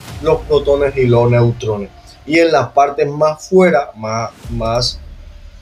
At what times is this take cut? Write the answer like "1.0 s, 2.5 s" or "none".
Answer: none